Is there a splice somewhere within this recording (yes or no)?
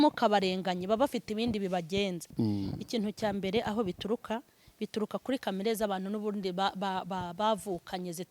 yes